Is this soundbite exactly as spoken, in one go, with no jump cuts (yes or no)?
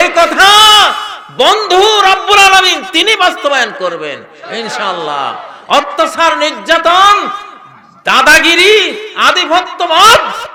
yes